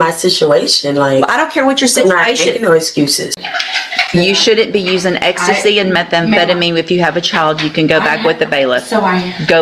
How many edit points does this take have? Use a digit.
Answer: 1